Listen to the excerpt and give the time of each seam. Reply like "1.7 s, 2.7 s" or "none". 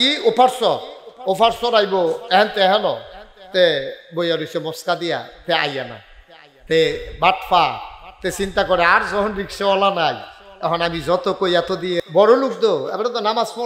12.0 s